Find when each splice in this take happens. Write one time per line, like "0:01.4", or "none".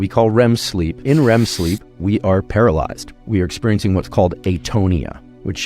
0:00.9